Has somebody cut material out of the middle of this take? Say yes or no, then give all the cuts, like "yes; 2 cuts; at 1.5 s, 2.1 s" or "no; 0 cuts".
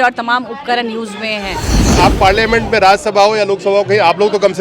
yes; 1 cut; at 1.9 s